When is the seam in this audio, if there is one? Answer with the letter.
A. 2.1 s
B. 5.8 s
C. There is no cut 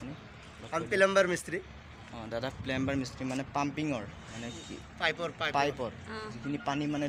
C